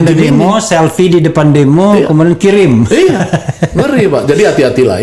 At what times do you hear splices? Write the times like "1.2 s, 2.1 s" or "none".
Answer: none